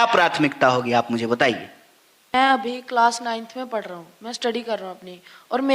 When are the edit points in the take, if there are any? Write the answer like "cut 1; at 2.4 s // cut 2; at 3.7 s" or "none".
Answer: cut 1; at 2.3 s

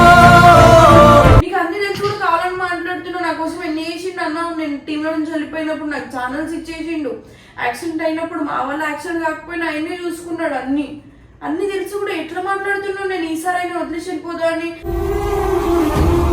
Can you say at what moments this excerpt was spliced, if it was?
cut 1; at 1.4 s

